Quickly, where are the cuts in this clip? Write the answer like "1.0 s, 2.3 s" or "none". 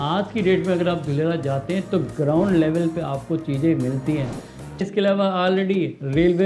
4.8 s